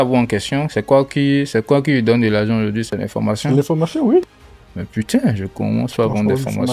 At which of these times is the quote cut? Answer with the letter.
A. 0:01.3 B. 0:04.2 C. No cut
B